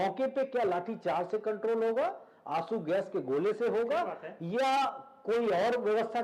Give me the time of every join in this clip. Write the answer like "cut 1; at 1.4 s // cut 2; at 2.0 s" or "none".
none